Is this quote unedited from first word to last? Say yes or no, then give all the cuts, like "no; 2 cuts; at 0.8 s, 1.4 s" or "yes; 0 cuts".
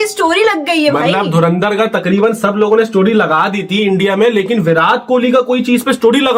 yes; 0 cuts